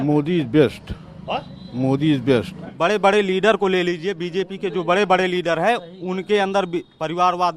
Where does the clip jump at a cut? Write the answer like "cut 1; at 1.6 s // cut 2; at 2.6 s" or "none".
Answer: cut 1; at 2.7 s